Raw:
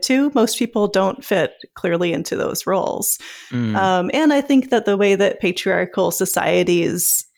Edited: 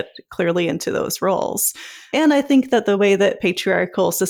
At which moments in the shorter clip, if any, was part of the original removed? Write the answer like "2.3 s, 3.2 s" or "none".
2.1 s